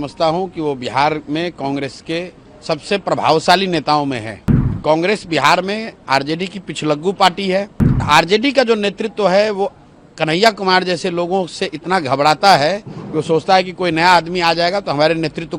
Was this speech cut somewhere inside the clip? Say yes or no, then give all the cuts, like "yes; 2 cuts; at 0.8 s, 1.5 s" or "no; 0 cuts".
yes; 2 cuts; at 4.8 s, 8.0 s